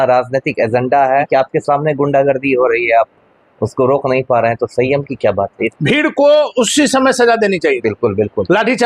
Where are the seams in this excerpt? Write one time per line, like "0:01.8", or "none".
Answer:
0:01.3
0:05.7